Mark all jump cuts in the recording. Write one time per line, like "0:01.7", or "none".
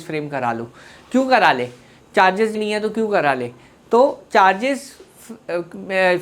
0:02.6